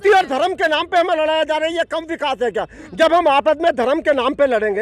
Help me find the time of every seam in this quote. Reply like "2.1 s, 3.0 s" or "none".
none